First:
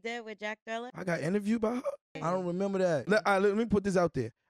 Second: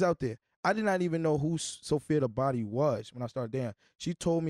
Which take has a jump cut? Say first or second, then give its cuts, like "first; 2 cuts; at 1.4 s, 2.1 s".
first; 3 cuts; at 0.9 s, 2.2 s, 3.0 s